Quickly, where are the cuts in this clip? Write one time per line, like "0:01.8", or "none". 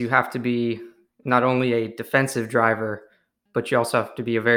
none